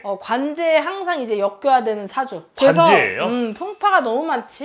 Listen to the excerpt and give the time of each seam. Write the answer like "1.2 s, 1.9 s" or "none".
none